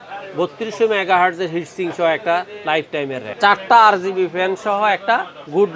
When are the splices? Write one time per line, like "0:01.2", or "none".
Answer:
0:03.2

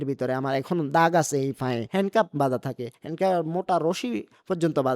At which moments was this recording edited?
0:01.8

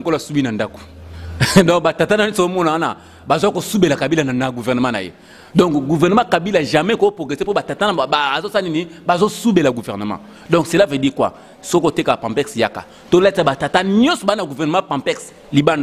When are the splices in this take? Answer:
none

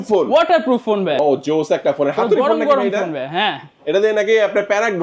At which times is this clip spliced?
0:01.2

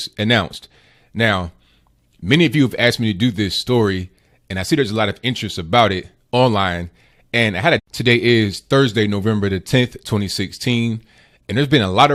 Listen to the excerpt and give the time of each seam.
none

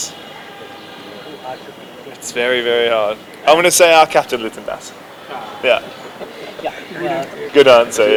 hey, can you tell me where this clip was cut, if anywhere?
none

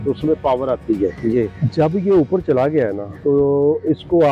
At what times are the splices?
0:01.6
0:03.1

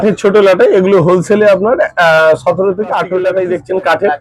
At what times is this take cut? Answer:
0:03.3

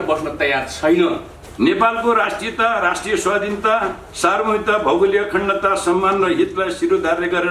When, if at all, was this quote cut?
0:01.4

